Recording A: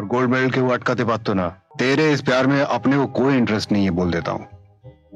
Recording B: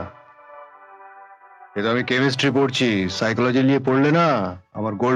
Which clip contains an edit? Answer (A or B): A